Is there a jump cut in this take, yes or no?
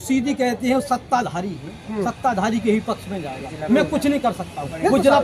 no